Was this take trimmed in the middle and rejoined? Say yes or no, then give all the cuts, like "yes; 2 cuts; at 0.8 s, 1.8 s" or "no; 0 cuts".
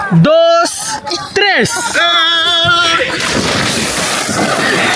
no; 0 cuts